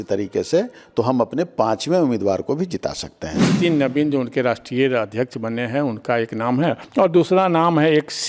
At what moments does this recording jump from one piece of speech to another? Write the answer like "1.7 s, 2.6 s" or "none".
3.5 s, 6.8 s